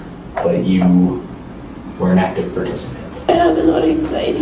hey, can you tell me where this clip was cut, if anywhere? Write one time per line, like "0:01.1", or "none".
0:03.2